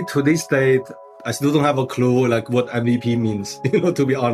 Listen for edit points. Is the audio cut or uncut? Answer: uncut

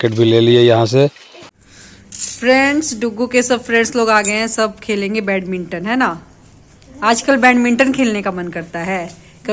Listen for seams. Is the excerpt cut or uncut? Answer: cut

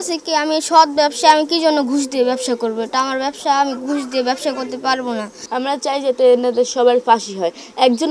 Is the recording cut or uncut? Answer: cut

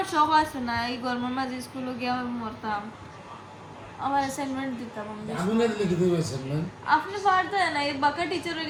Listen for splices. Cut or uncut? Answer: uncut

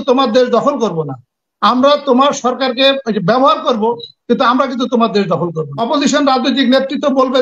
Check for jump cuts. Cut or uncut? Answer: cut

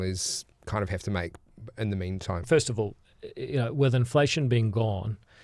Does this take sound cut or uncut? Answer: cut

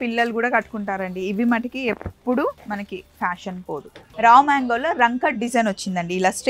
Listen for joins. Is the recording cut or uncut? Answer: cut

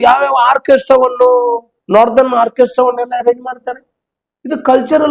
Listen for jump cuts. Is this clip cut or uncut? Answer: uncut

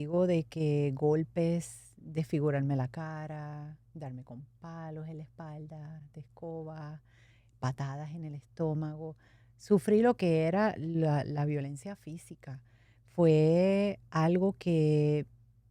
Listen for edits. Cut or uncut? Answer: uncut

